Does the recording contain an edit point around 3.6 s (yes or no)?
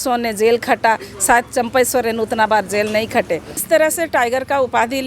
yes